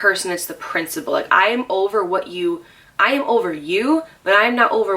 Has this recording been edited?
no; 0 cuts

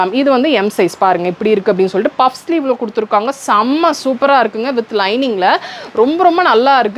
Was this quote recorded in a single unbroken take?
yes; 0 cuts

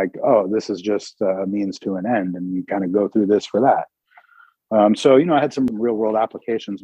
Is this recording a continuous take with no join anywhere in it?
no; 1 cut; at 5.7 s

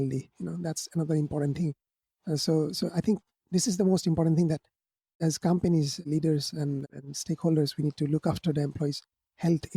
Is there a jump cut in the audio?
yes; 1 cut; at 5.1 s

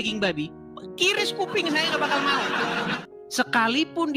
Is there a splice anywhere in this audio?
yes; 1 cut; at 3.0 s

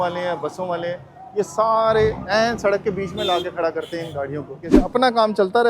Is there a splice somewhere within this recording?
yes; 1 cut; at 4.7 s

